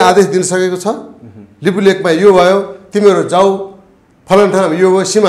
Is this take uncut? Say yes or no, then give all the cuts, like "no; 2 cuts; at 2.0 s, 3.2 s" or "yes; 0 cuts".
yes; 0 cuts